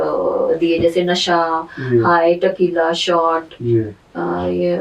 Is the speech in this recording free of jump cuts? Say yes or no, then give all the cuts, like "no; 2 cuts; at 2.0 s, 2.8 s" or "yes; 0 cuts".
yes; 0 cuts